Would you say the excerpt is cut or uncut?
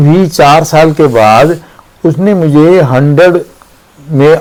uncut